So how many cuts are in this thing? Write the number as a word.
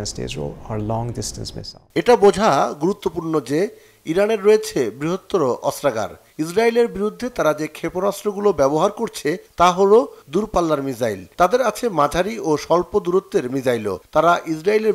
zero